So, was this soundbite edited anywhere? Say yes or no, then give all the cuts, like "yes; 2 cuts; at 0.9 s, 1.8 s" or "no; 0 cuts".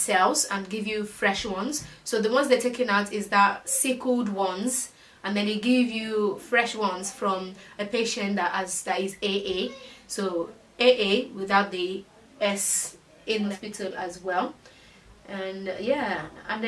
yes; 1 cut; at 13.5 s